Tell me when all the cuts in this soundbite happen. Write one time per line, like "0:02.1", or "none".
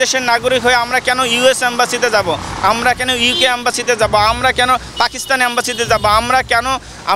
none